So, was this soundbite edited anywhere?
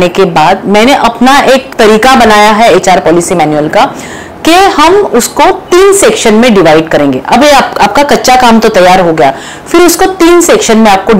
yes; 1 cut; at 1.6 s

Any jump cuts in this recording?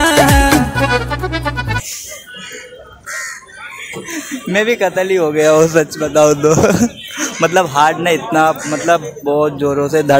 no; 0 cuts

